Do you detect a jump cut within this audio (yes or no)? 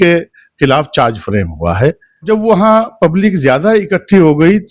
yes